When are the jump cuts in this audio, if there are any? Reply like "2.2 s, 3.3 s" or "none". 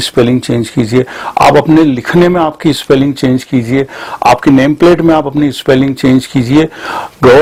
none